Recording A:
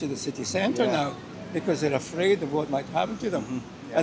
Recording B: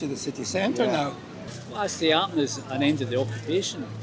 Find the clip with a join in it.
B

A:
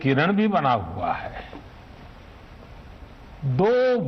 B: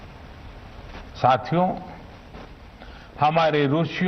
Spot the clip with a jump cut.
B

